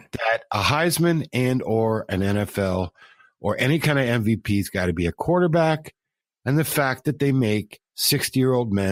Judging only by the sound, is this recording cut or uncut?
uncut